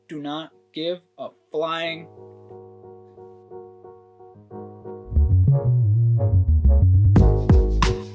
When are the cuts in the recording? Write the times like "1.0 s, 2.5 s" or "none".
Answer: 2.2 s